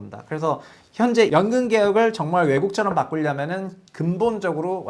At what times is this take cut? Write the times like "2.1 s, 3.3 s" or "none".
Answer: 1.3 s